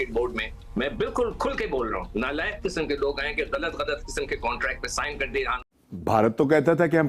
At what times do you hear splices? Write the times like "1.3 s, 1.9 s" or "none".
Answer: 5.6 s